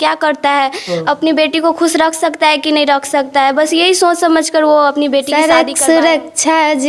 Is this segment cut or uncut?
cut